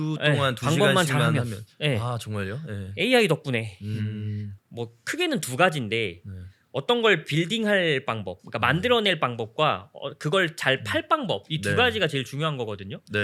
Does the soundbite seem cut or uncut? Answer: uncut